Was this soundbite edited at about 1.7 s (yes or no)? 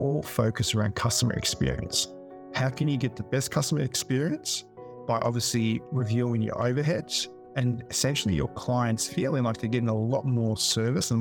no